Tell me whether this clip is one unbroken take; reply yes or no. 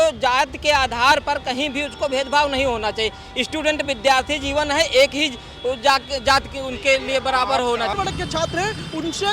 no